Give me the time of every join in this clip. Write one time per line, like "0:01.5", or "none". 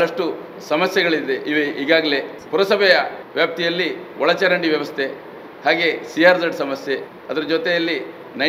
0:02.3
0:03.2
0:07.2